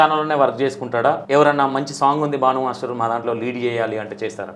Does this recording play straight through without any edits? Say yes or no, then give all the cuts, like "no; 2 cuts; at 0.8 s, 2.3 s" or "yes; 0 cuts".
no; 1 cut; at 1.2 s